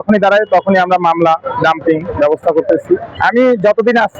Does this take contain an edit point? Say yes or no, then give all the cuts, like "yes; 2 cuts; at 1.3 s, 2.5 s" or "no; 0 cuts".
yes; 1 cut; at 3.1 s